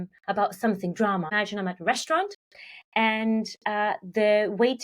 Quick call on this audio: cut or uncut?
cut